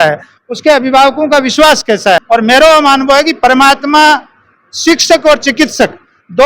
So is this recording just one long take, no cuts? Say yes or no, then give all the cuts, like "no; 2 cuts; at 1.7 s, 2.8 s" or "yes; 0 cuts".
no; 1 cut; at 2.2 s